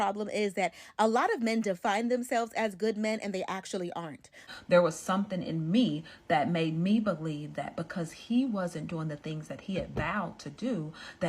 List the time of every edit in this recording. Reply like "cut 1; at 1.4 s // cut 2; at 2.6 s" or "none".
cut 1; at 4.4 s